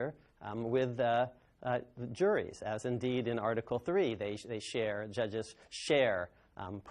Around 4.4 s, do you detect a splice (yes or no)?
yes